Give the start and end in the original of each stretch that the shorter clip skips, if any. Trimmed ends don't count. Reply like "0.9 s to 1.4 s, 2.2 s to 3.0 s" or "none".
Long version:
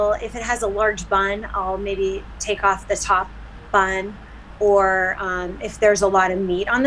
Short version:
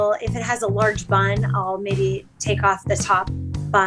none